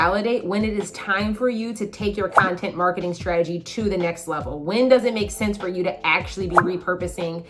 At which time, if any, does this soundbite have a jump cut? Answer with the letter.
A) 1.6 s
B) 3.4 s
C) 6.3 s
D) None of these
D